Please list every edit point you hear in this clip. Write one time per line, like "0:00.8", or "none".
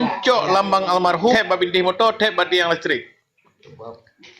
0:01.3